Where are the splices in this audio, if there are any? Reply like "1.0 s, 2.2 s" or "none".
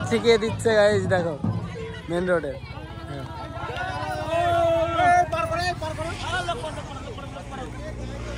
none